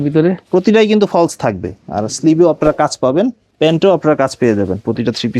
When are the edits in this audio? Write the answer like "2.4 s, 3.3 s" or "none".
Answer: 3.4 s